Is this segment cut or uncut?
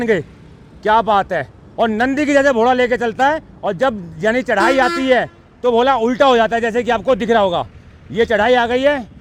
uncut